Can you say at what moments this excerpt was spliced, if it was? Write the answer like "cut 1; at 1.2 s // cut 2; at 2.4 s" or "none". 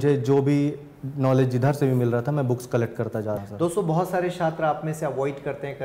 cut 1; at 3.4 s